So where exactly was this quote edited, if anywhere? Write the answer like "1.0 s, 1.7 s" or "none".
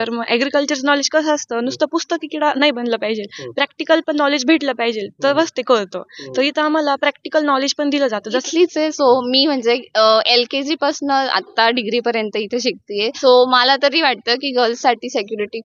8.4 s, 13.1 s

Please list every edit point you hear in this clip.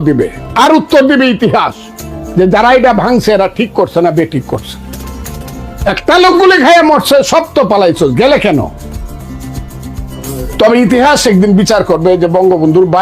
9.2 s

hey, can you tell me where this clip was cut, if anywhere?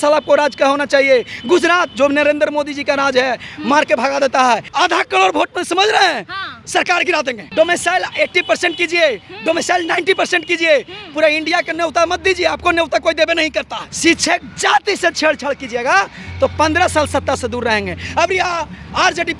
4.7 s, 7.4 s, 13.8 s

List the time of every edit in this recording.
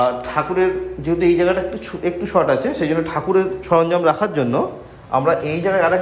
none

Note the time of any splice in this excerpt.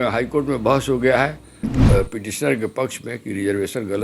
1.7 s

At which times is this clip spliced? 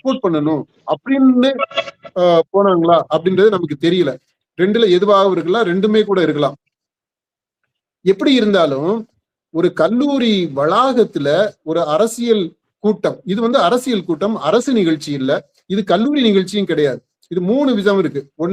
none

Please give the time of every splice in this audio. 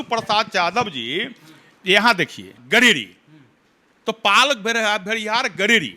2.5 s

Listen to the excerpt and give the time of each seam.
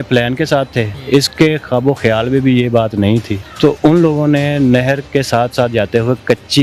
1.0 s, 3.4 s

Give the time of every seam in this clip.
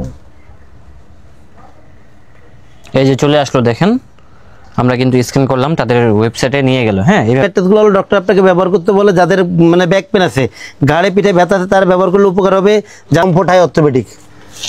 7.4 s, 13.2 s

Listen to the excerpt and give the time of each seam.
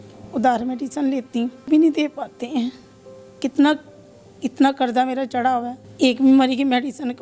1.7 s, 5.8 s

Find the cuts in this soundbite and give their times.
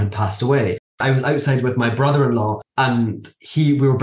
1.0 s, 2.6 s

